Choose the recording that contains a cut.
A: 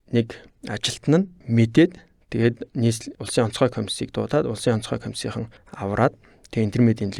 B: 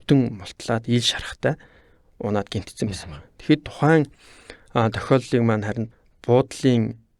B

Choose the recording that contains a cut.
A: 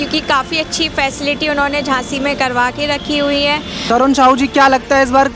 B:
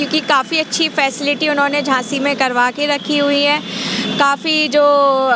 A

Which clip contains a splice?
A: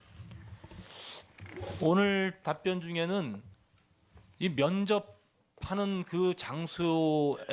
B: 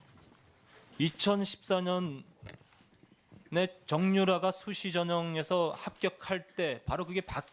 A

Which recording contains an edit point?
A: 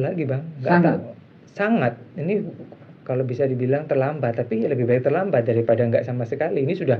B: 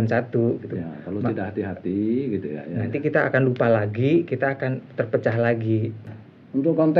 B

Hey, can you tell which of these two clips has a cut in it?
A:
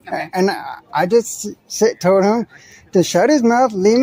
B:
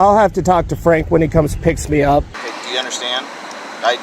B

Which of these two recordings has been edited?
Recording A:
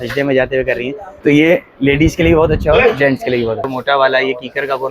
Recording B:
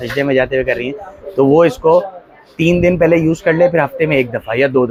A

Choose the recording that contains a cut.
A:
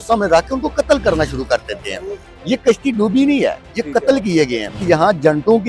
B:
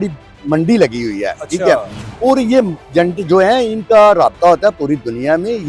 A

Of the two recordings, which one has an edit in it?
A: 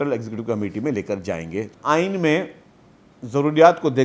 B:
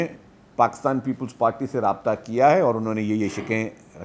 A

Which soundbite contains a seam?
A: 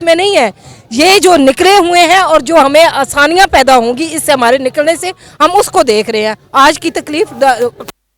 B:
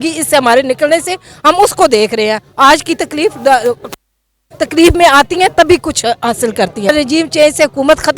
B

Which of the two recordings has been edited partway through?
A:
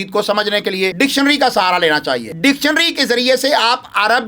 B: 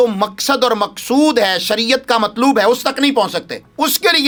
A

